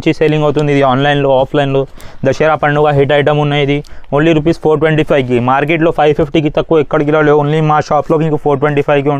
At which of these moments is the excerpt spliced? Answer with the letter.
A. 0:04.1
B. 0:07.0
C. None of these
C